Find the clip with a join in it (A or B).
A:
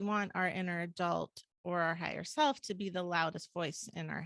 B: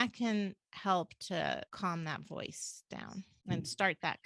B